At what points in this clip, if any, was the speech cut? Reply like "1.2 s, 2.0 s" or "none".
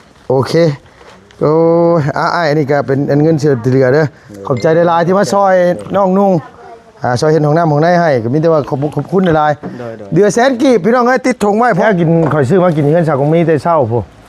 11.8 s